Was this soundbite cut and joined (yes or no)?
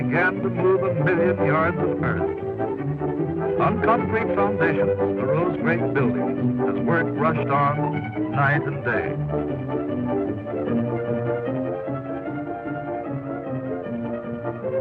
no